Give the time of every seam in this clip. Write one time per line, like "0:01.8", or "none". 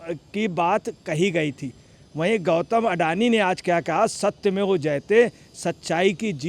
none

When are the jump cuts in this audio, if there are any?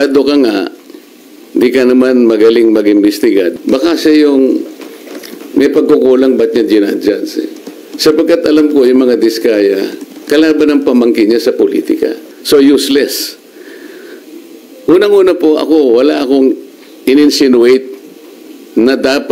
0:03.5
0:12.3

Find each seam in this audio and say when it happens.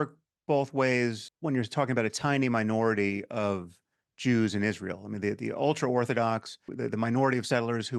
0:01.2
0:06.7

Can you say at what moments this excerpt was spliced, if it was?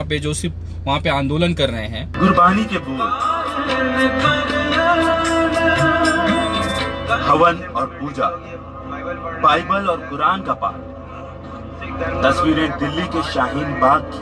0:02.0

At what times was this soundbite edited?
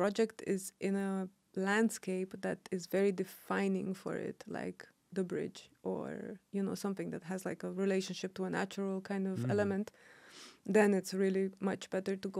none

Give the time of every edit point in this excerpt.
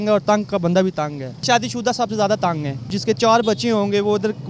0:01.5
0:03.0

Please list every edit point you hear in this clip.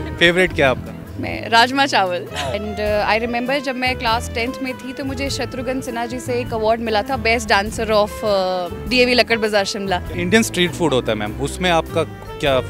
0:02.6
0:10.1

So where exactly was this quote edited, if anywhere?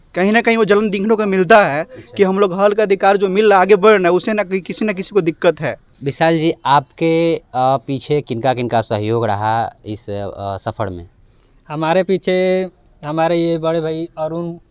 0:05.9

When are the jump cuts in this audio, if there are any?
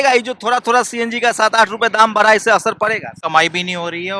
0:03.1

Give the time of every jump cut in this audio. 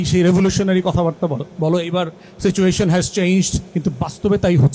0:01.5
0:03.6

